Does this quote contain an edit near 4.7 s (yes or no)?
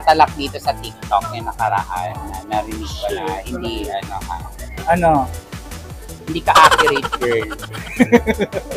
no